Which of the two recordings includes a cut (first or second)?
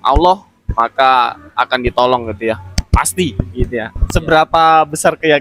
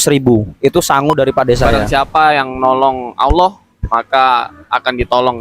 second